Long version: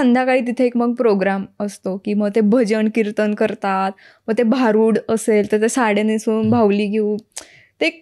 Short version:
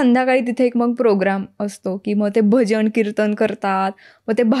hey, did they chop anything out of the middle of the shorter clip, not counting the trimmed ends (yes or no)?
no